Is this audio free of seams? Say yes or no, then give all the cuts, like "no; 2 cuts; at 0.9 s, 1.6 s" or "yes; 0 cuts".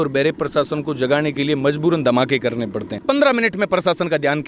no; 1 cut; at 2.9 s